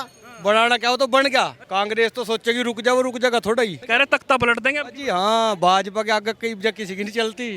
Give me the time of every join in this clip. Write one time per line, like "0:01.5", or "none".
0:01.6
0:03.8